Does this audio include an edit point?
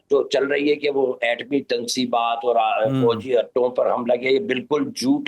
no; 0 cuts

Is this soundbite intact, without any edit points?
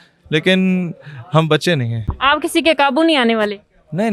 yes; 0 cuts

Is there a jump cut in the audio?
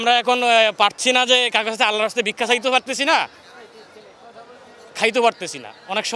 no; 0 cuts

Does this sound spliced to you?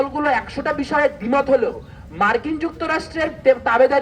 no; 0 cuts

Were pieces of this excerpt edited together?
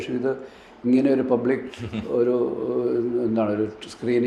no; 0 cuts

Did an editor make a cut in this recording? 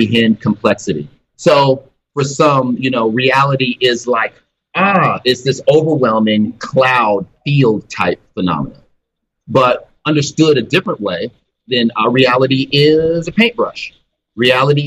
yes; 3 cuts; at 1.3 s, 2.0 s, 9.9 s

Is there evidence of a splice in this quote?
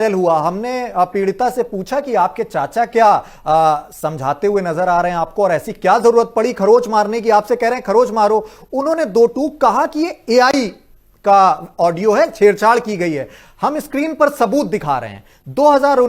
no; 0 cuts

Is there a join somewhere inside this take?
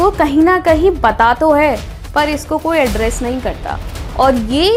no; 0 cuts

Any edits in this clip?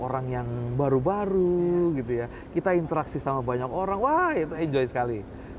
no; 0 cuts

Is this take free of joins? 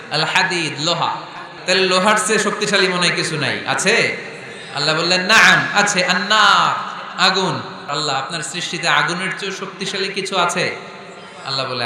no; 2 cuts; at 1.5 s, 7.8 s

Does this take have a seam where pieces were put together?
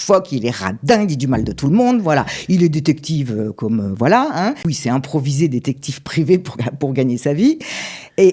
yes; 1 cut; at 4.6 s

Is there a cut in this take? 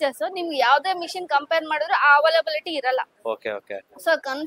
no; 0 cuts

